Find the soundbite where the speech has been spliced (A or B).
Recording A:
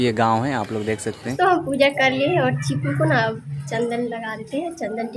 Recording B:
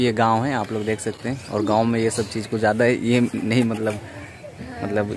A